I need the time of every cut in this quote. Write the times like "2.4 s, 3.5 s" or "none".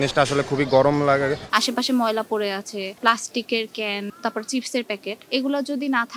1.4 s, 3.0 s, 4.1 s, 5.1 s